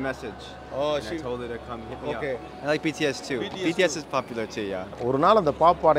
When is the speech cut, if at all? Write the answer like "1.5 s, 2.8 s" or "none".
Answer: 2.5 s, 4.9 s

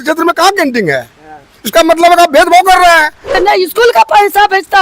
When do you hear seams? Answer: 3.4 s

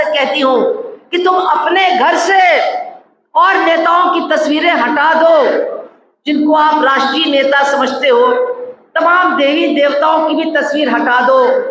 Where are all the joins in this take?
none

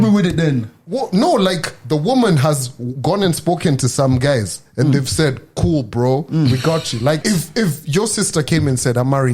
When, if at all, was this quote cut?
7.2 s

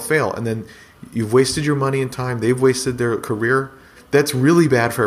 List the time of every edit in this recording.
3.9 s

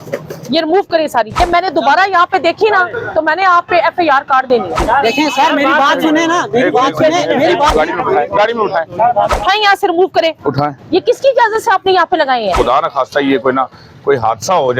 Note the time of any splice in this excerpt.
1.4 s, 4.8 s, 7.7 s, 9.3 s, 12.5 s

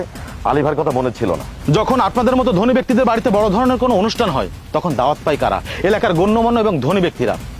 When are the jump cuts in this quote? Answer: 1.5 s

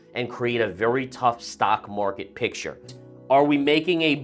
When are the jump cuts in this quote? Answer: 3.0 s

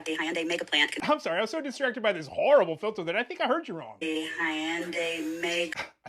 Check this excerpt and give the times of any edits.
none

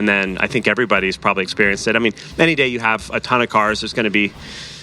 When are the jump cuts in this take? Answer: none

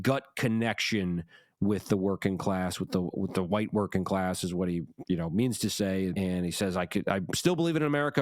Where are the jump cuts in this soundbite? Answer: 6.1 s

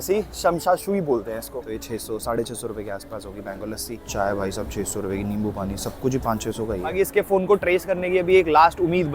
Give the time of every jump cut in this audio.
1.4 s, 4.0 s, 6.9 s

